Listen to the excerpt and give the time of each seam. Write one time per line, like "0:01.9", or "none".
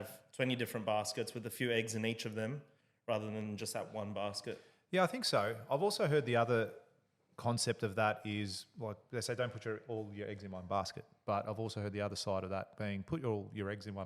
none